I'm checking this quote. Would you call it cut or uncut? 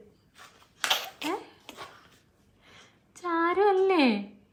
uncut